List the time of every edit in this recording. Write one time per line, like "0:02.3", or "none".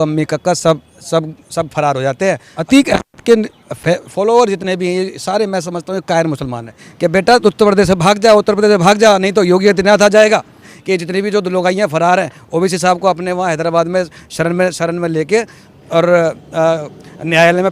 0:02.5
0:06.8
0:10.7